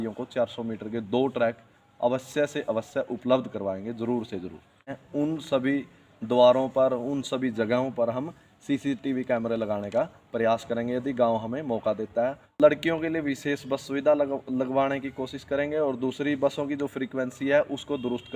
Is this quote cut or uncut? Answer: cut